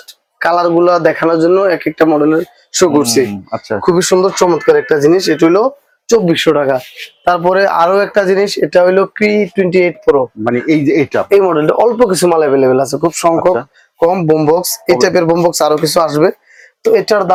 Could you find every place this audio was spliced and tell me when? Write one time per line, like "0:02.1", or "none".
none